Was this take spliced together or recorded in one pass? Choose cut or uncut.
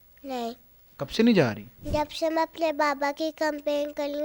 cut